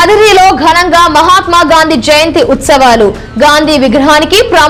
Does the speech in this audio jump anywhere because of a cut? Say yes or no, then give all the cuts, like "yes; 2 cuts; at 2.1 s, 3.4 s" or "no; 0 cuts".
no; 0 cuts